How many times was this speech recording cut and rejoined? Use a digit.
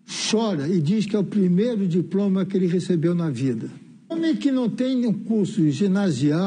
1